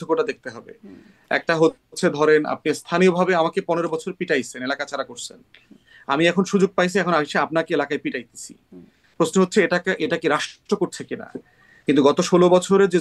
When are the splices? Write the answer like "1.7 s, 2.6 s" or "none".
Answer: none